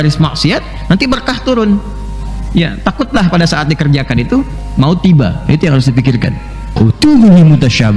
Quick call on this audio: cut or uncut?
cut